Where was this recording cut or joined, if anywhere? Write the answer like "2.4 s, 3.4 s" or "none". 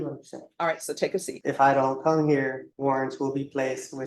1.3 s, 2.7 s